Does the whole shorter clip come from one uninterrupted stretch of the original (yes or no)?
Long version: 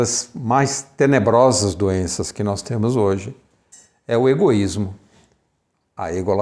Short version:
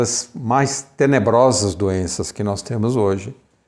yes